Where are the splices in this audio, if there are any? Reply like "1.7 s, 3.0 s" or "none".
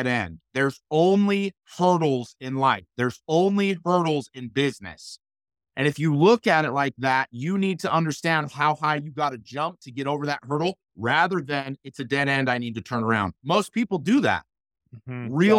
13.4 s